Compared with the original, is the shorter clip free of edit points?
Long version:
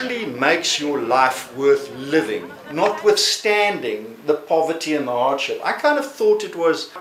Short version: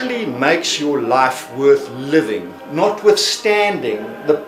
yes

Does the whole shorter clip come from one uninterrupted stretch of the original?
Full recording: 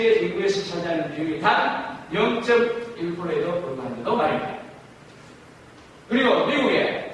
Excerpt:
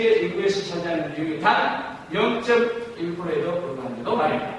yes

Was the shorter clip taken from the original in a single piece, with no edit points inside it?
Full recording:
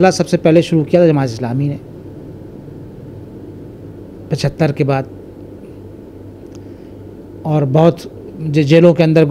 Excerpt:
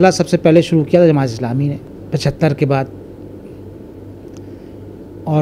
no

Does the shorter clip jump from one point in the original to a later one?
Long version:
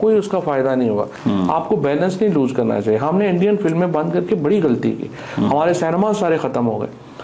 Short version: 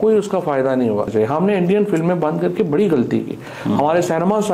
yes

